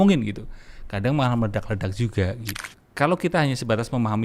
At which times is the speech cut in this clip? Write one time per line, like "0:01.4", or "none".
0:02.6